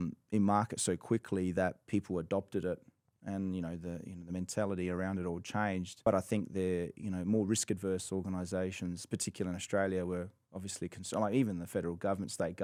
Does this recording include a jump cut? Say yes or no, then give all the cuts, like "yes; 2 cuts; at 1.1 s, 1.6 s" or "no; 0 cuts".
no; 0 cuts